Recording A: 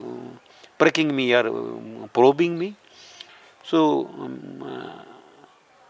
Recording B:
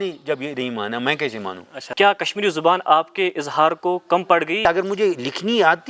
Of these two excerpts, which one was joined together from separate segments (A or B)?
B